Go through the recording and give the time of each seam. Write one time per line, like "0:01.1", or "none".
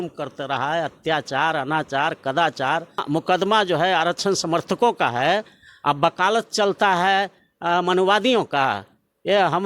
0:03.0